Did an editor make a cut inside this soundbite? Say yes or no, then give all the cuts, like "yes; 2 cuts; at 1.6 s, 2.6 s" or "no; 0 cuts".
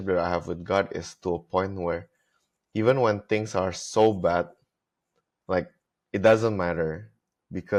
no; 0 cuts